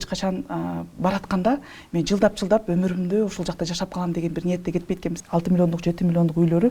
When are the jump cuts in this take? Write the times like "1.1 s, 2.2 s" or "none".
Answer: 5.2 s